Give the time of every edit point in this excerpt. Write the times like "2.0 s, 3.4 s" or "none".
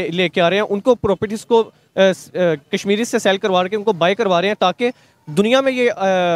none